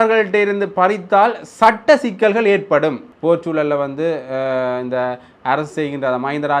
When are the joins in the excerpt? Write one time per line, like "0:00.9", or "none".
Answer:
0:03.1